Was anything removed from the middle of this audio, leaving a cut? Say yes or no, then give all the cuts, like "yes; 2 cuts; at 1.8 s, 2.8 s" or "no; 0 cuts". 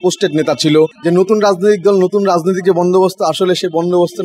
yes; 1 cut; at 1.0 s